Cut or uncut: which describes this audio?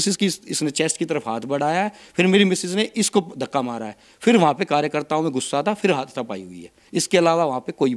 uncut